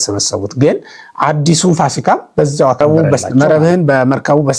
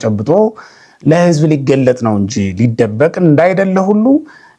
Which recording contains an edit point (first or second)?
first